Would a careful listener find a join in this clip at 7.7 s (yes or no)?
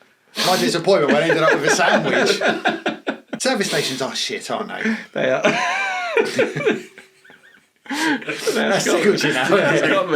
no